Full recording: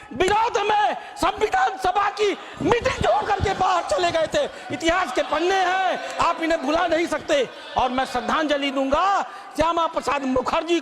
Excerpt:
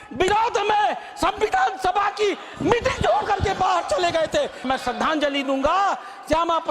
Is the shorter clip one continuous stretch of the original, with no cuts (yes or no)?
no